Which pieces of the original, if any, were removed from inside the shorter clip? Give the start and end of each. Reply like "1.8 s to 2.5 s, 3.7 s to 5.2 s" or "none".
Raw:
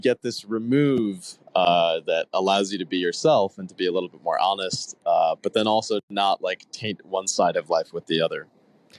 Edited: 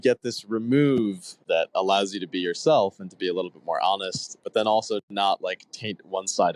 1.4 s to 2.0 s, 5.0 s to 5.4 s